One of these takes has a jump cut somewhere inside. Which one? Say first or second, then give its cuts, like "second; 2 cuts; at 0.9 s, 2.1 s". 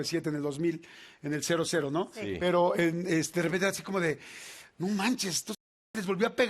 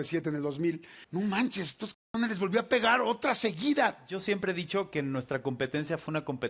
second; 1 cut; at 0.9 s